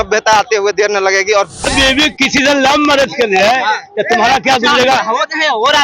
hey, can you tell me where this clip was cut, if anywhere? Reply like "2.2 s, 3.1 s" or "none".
1.7 s